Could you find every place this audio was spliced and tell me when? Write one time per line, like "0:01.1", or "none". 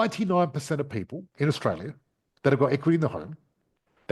0:01.2